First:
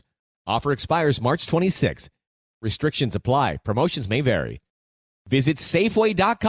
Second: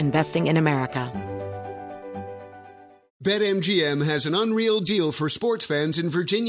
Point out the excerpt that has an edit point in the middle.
second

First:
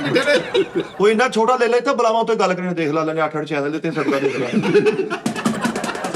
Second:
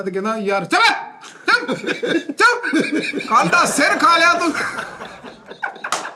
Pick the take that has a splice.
first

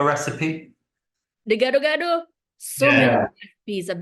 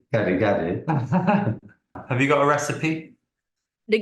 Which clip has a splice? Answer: second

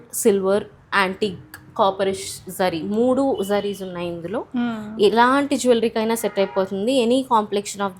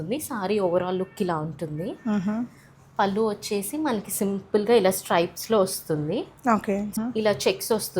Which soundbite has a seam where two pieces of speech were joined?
second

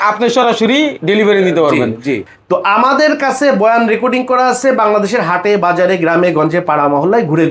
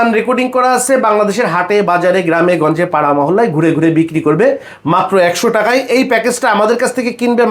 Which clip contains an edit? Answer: first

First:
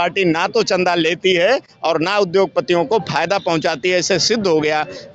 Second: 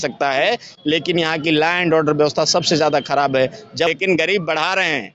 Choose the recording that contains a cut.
second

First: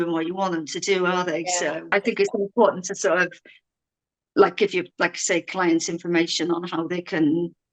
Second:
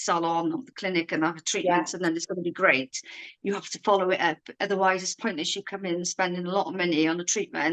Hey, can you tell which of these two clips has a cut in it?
first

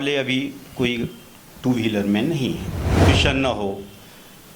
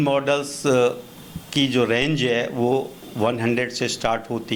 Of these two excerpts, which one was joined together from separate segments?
first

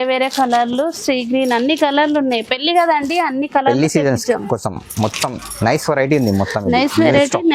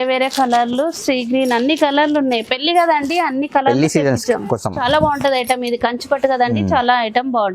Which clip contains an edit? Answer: second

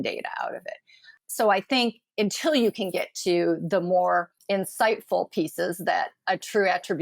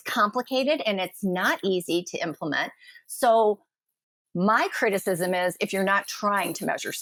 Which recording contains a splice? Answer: first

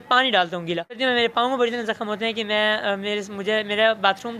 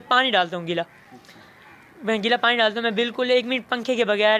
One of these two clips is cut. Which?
first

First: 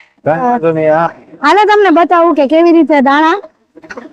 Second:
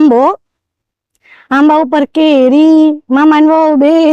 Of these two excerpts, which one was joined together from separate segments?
first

